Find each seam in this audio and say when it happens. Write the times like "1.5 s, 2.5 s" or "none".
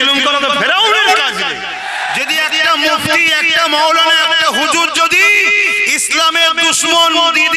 1.8 s